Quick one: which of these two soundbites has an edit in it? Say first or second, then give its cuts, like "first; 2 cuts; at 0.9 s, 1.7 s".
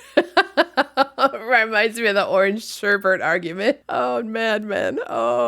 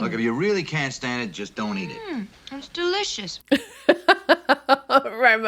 first; 1 cut; at 3.8 s